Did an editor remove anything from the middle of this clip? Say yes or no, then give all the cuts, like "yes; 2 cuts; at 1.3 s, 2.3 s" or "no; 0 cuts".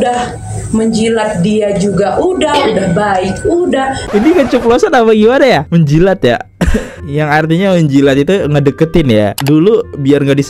no; 0 cuts